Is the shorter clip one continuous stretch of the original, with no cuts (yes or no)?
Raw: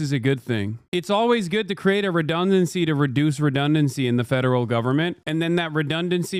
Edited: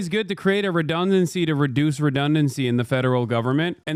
yes